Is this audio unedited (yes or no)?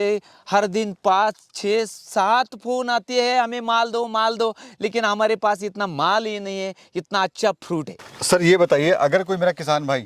yes